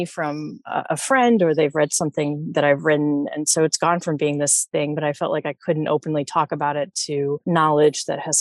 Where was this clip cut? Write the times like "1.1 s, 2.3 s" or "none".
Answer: 5.0 s, 7.4 s